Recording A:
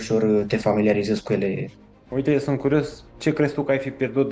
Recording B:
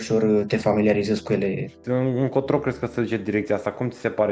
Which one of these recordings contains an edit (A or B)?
A